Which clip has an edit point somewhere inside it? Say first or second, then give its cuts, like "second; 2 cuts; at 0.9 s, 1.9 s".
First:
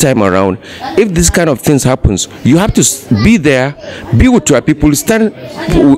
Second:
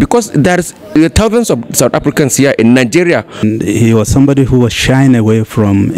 second; 1 cut; at 3.4 s